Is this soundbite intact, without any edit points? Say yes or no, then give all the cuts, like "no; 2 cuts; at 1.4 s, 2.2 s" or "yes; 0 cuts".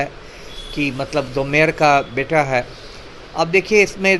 yes; 0 cuts